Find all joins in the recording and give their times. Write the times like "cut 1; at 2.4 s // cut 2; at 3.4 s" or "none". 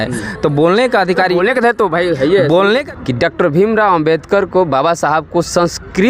cut 1; at 2.8 s